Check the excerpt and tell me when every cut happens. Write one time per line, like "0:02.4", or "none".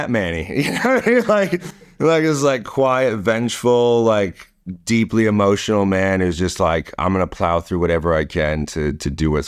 none